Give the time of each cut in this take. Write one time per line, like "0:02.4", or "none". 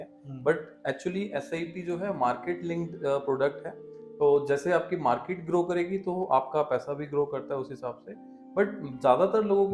none